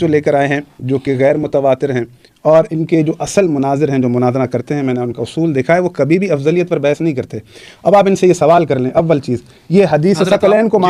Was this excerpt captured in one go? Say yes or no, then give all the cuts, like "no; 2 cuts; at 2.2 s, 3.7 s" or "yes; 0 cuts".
yes; 0 cuts